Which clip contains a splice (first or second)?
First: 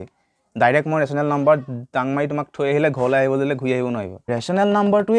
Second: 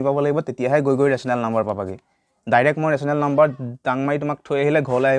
first